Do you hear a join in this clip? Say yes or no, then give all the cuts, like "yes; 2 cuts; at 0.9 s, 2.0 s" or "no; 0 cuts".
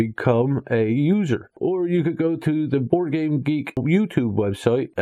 no; 0 cuts